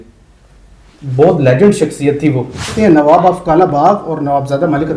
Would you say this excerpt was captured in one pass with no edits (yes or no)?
no